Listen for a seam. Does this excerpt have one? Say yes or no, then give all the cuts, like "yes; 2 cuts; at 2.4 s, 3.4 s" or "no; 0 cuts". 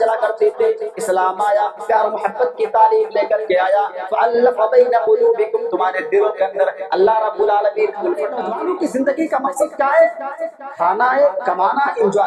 yes; 1 cut; at 8.4 s